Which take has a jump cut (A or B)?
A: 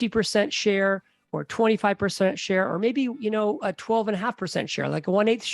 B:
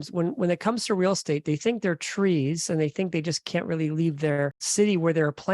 B